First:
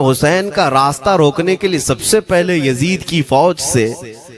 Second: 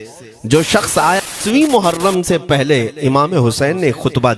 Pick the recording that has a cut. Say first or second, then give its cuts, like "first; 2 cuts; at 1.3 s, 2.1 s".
second; 1 cut; at 1.3 s